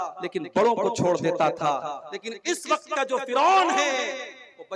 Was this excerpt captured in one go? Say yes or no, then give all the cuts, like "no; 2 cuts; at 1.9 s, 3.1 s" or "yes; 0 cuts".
yes; 0 cuts